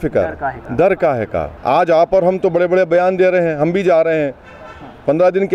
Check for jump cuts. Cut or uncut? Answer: cut